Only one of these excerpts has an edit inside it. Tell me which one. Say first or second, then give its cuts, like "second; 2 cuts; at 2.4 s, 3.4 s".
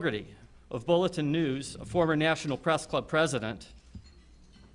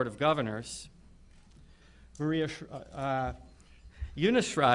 second; 1 cut; at 3.1 s